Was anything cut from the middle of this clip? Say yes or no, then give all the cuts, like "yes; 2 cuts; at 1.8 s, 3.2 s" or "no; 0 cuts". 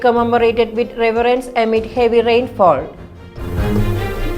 yes; 1 cut; at 3.4 s